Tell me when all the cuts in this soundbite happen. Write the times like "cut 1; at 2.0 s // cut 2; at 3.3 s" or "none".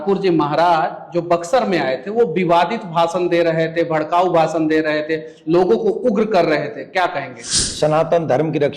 cut 1; at 7.7 s